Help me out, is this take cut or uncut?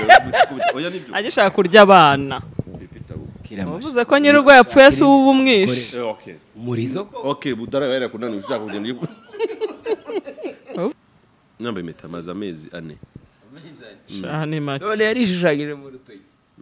cut